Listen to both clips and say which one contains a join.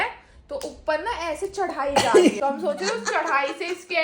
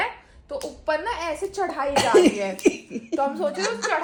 first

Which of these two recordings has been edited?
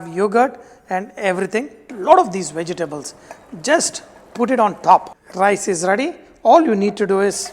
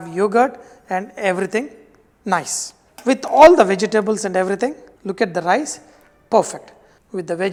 first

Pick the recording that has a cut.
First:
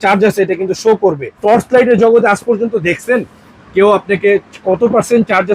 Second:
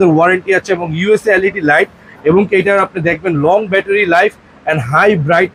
first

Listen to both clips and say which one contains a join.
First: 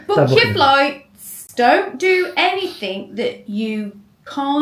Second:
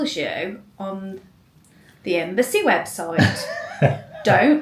first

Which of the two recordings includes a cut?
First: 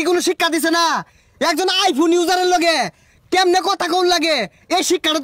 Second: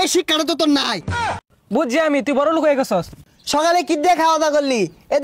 second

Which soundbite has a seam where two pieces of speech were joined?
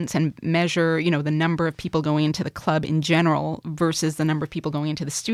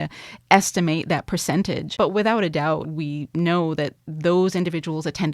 second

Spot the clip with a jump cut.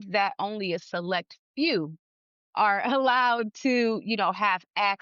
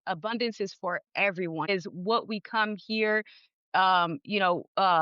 second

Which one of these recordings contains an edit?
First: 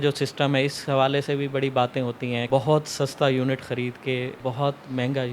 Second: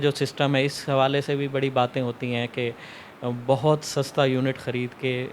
first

